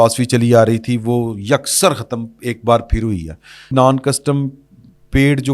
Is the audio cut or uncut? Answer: cut